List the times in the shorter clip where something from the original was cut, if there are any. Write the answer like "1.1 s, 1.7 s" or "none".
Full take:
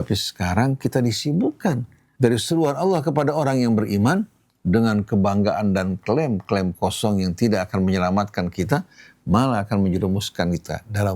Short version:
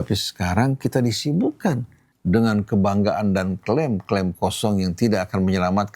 2.0 s